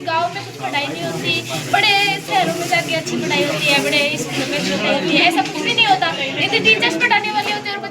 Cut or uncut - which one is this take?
uncut